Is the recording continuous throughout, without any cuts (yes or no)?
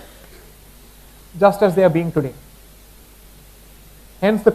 yes